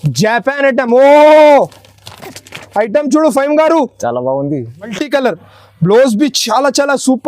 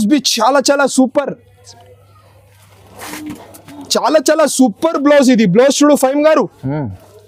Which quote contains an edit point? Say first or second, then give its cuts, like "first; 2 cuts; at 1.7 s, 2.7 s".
first; 1 cut; at 4.8 s